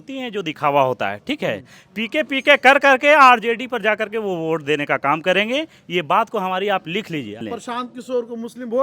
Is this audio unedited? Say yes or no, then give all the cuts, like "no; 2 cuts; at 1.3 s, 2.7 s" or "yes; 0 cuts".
no; 1 cut; at 7.4 s